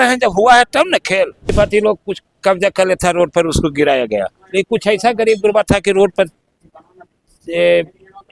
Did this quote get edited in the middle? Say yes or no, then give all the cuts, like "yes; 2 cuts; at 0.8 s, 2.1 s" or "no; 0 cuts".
yes; 1 cut; at 1.5 s